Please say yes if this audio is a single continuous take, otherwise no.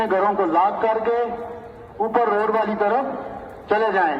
yes